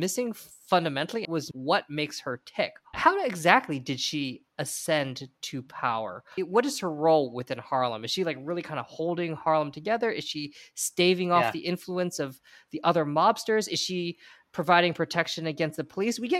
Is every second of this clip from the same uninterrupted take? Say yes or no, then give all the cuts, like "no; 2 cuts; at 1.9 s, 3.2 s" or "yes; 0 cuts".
no; 3 cuts; at 1.2 s, 3.0 s, 6.2 s